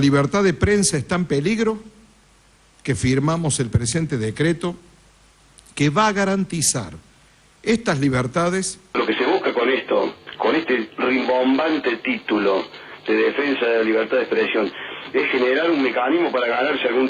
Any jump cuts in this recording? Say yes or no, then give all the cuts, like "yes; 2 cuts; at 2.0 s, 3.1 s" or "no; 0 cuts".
no; 0 cuts